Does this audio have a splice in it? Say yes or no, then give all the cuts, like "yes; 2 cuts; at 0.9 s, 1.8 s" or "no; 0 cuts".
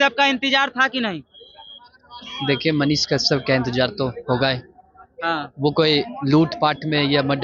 no; 0 cuts